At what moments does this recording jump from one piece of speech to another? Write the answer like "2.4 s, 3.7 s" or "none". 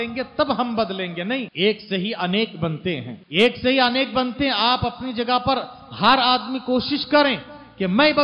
1.5 s, 3.2 s